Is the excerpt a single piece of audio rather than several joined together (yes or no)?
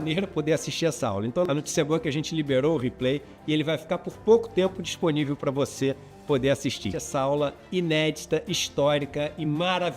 no